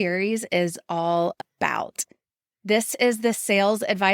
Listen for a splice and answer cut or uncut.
cut